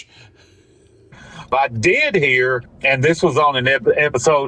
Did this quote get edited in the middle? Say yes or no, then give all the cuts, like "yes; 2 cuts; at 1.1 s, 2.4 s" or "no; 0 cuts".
yes; 1 cut; at 1.2 s